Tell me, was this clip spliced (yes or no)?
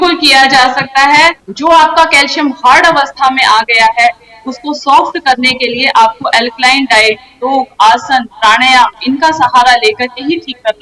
yes